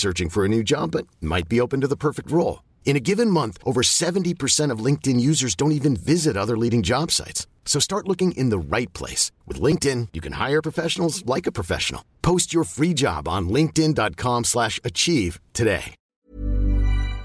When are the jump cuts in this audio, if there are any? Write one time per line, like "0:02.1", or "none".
0:16.1